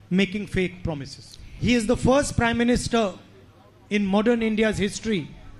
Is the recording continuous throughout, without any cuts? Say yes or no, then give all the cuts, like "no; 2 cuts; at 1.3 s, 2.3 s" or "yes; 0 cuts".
no; 1 cut; at 1.5 s